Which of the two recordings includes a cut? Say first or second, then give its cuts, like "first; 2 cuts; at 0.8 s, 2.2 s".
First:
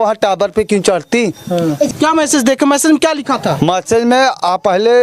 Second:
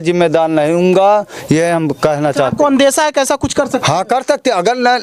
first; 1 cut; at 1.9 s